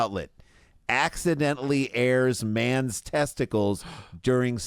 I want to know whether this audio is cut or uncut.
uncut